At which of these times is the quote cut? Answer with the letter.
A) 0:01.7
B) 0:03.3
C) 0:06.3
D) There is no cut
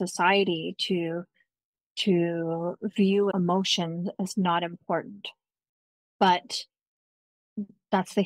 B